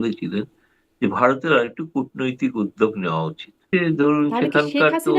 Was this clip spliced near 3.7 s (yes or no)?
yes